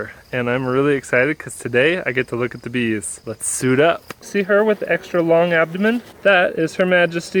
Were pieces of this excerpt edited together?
yes; 3 cuts; at 3.2 s, 4.2 s, 6.1 s

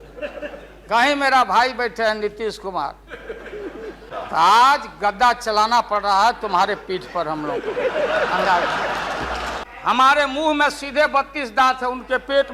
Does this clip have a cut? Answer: yes; 2 cuts; at 4.1 s, 9.6 s

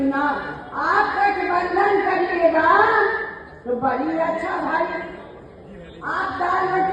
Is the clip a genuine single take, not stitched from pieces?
yes; 0 cuts

